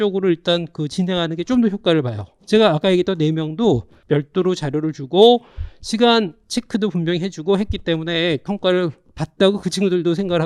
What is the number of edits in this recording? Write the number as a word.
two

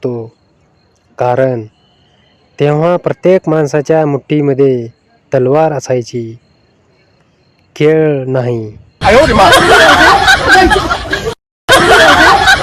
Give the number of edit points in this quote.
one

